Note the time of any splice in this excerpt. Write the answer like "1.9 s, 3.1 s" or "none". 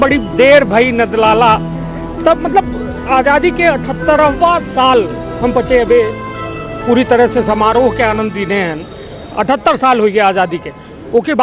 none